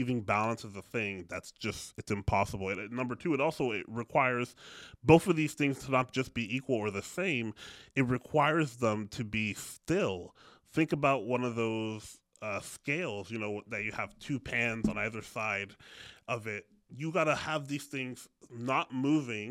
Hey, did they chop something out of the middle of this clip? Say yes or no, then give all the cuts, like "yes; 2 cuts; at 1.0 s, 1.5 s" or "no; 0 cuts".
no; 0 cuts